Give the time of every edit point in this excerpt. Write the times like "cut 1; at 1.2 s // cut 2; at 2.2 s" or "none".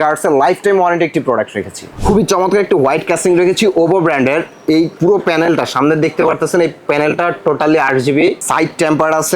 cut 1; at 2.0 s // cut 2; at 8.4 s